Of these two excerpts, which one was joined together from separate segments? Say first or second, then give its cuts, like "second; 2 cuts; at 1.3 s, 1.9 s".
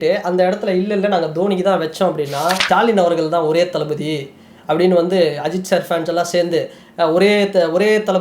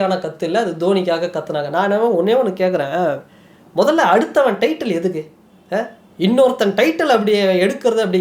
first; 1 cut; at 2.6 s